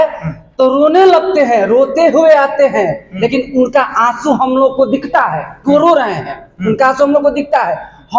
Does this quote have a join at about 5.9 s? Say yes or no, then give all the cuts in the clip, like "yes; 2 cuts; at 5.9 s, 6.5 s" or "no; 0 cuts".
no; 0 cuts